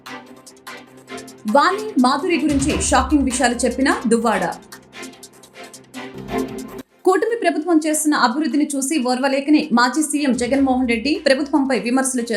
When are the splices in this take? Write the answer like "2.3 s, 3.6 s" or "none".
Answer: 1.4 s